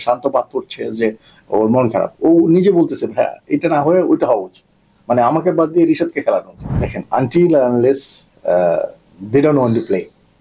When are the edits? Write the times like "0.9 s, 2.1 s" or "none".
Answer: 6.6 s

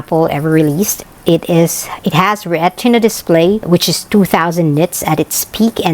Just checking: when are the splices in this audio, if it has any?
none

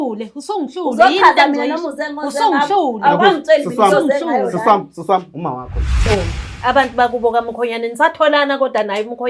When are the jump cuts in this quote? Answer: 6.0 s

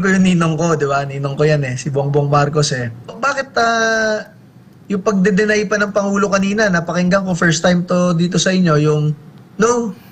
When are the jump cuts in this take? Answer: 3.2 s

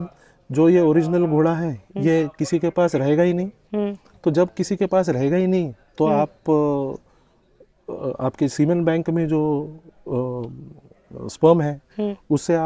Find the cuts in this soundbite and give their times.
none

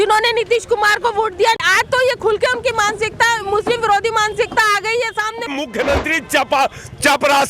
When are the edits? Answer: 1.6 s, 5.5 s

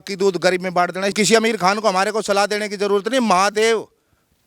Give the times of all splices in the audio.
1.1 s

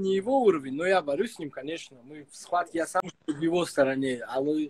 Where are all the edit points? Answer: 3.0 s

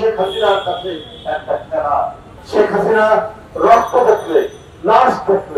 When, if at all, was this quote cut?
2.3 s

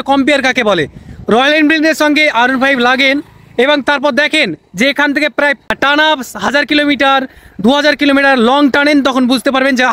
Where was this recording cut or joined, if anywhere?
5.7 s

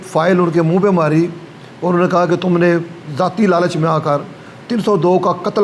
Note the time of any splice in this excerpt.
none

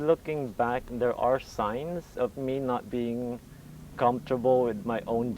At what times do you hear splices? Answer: 2.1 s

